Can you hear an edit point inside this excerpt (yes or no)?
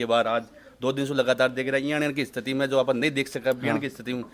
no